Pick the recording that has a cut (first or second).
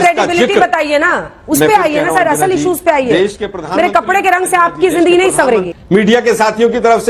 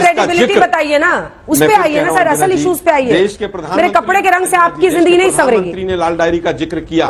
first